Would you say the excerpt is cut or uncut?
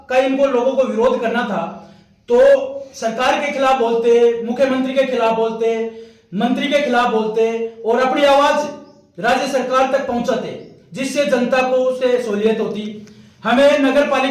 uncut